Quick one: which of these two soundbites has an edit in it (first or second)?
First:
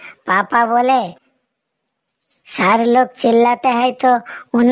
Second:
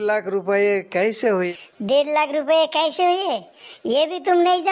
second